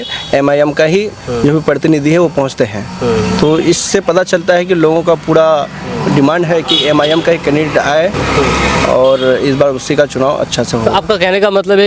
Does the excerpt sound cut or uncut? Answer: uncut